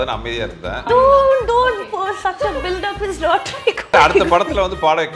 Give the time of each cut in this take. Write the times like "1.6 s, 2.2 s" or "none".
0.9 s, 3.9 s